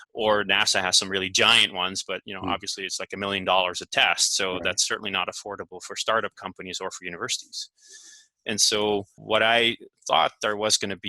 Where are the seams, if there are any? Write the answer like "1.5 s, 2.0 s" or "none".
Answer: 9.1 s

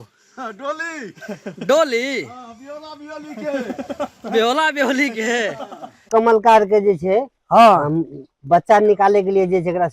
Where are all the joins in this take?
6.1 s

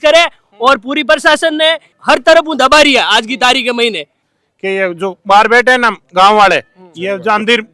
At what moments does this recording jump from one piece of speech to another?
1.9 s, 4.1 s

